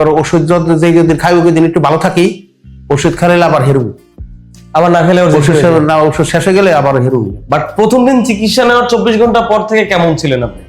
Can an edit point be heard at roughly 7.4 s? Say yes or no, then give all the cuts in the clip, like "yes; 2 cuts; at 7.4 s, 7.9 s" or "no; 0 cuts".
yes; 1 cut; at 7.4 s